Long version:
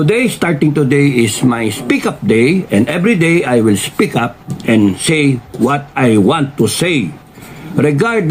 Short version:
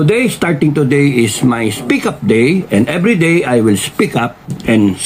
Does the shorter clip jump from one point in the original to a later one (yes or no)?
no